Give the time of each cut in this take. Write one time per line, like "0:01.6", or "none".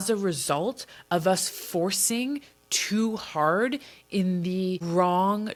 none